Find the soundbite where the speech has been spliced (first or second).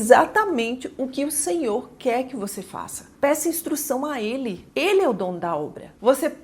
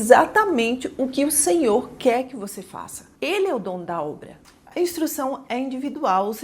second